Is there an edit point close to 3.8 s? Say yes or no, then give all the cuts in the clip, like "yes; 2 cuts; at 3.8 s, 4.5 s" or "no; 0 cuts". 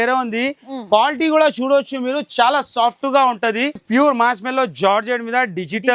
yes; 1 cut; at 3.8 s